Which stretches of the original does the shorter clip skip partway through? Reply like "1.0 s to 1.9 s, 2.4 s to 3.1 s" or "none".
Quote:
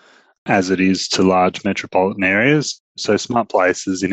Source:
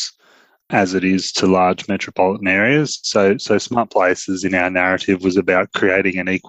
3.1 s to 3.3 s